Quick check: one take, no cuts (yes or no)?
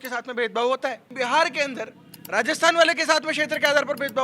no